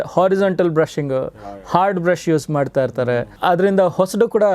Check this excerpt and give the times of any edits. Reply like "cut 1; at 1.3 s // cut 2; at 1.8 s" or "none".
cut 1; at 3.3 s